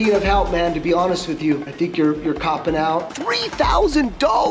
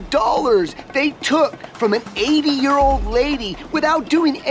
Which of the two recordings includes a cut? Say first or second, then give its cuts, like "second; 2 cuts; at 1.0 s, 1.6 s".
first; 2 cuts; at 1.7 s, 3.1 s